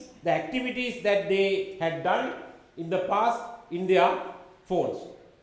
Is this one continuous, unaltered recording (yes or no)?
yes